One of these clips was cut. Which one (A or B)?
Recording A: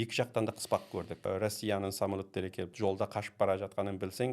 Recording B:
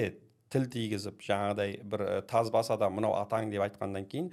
A